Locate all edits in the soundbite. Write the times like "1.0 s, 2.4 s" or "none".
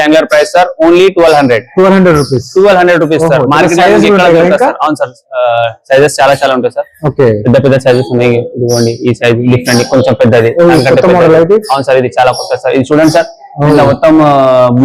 none